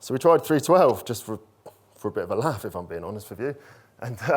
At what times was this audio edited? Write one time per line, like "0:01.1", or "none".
none

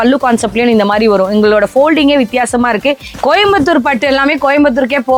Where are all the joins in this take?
0:03.1

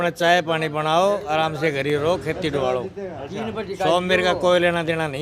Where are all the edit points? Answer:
none

